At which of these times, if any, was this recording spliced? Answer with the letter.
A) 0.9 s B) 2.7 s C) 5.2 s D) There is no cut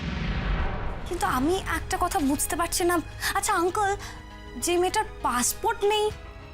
A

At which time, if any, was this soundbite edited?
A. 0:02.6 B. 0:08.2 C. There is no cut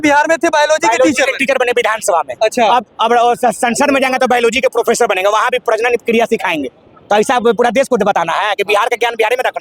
C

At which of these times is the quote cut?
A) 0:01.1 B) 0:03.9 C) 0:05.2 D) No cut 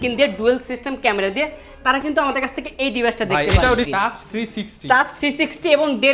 B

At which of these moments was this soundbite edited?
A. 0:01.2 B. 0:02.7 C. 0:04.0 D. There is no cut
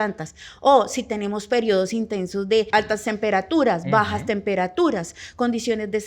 B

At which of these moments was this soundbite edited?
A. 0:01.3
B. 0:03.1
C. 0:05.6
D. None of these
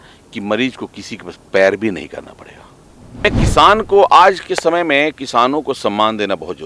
B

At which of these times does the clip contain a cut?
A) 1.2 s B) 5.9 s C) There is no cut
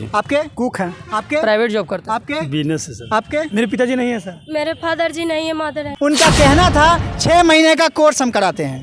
B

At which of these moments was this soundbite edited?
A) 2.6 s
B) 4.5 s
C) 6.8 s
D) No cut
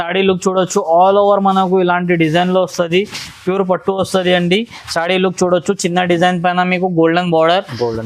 D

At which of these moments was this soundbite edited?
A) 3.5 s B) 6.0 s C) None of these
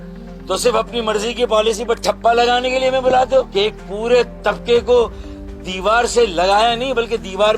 A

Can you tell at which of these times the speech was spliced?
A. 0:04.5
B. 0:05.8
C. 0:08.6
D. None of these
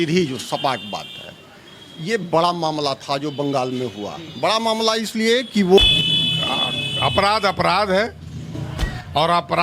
B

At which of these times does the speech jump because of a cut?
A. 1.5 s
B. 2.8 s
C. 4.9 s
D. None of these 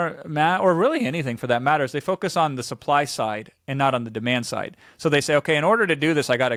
D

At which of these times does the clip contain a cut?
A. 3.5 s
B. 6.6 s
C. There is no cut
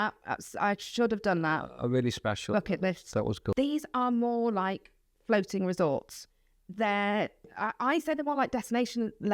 A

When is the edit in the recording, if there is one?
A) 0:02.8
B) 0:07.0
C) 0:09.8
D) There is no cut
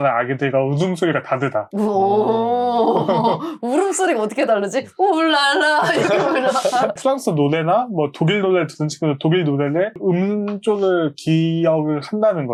D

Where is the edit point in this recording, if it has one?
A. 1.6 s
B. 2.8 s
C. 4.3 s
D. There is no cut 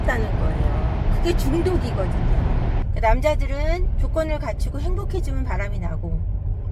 B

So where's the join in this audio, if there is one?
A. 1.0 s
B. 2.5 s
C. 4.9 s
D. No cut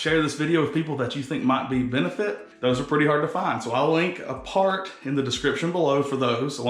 B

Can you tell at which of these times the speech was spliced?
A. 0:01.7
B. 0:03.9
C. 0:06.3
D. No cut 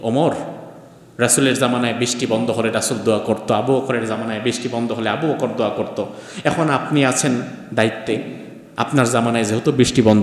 D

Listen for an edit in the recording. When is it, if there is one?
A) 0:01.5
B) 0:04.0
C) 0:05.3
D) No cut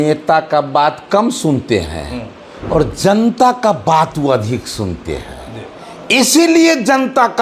D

